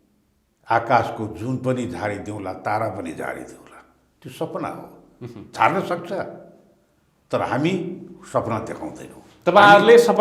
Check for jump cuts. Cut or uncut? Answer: uncut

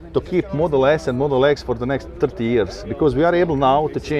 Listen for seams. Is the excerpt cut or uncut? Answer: uncut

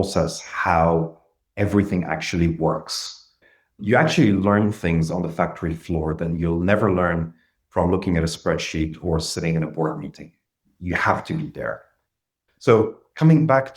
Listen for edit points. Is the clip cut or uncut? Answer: cut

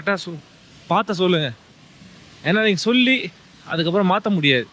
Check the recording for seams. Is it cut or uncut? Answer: uncut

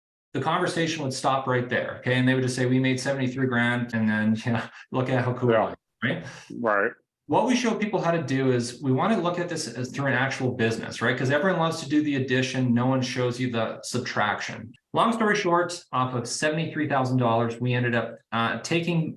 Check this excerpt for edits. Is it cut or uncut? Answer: cut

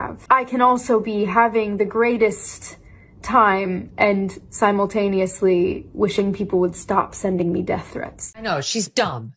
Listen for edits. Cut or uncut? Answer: cut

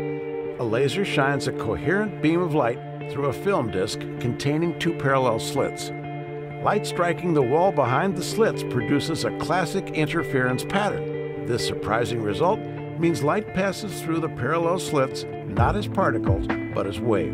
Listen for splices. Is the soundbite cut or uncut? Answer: uncut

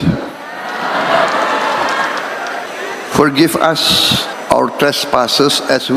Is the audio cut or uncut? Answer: cut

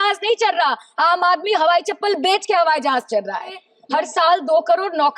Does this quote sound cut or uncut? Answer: cut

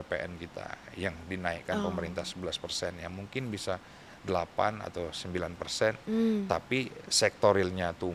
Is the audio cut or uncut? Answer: uncut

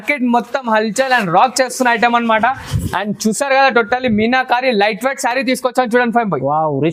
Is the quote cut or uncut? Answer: uncut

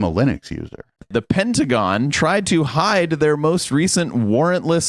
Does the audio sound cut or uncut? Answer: cut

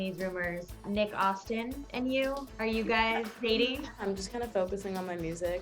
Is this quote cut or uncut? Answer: cut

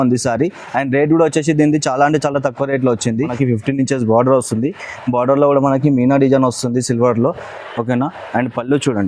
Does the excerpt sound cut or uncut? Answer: cut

